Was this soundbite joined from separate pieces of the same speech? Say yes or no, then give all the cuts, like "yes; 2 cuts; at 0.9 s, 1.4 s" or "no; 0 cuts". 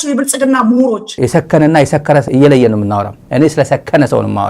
yes; 1 cut; at 1.1 s